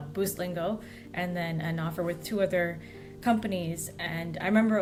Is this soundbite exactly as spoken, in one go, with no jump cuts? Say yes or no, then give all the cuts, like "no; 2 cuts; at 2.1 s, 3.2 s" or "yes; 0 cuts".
yes; 0 cuts